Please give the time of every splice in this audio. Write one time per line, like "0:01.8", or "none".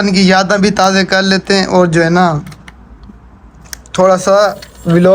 none